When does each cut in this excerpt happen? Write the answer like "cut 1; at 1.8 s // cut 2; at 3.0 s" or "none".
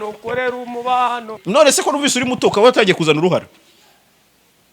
cut 1; at 1.4 s

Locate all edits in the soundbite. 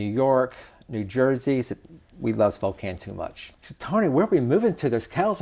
cut 1; at 3.4 s

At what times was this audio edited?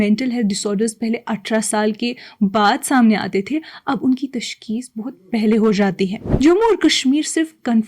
cut 1; at 6.2 s

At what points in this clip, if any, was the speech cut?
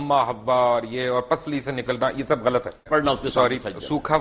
cut 1; at 2.9 s

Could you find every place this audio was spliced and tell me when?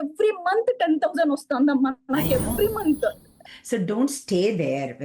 cut 1; at 3.3 s

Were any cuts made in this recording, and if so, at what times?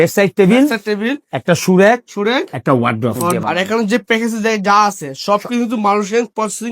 cut 1; at 3.2 s

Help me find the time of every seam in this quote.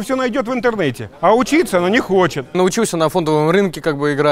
cut 1; at 2.5 s

